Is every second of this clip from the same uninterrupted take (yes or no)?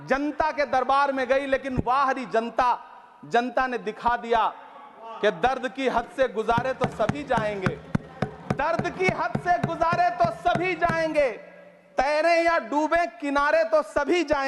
yes